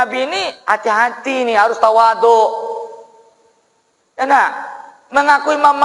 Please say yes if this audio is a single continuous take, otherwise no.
yes